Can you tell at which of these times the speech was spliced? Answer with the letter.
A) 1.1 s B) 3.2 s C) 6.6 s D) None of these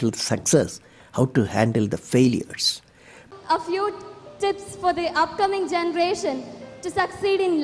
B